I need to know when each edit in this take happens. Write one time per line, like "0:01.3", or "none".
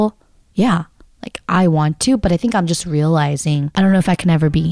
0:03.7